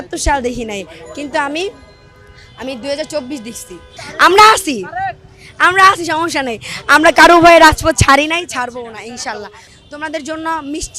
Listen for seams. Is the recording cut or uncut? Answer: uncut